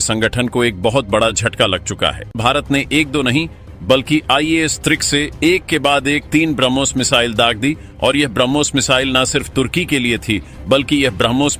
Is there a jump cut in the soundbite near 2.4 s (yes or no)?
yes